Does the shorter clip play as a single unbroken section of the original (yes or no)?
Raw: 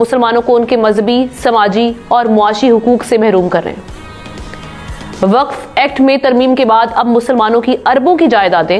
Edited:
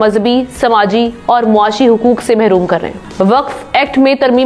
no